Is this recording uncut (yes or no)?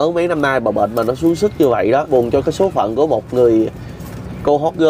no